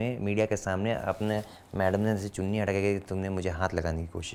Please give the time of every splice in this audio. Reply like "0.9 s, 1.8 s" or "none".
none